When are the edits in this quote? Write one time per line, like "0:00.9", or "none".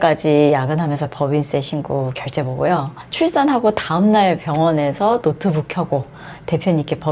none